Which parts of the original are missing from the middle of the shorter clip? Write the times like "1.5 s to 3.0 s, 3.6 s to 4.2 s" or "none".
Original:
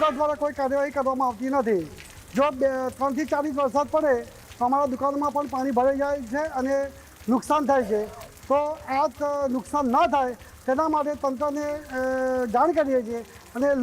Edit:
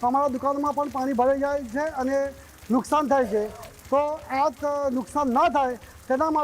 none